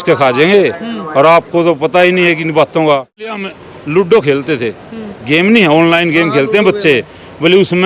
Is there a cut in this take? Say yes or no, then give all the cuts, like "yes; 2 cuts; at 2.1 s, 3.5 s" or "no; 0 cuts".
yes; 1 cut; at 3.4 s